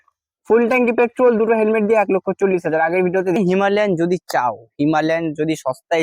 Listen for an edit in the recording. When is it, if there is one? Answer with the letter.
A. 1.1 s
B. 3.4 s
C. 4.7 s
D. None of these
B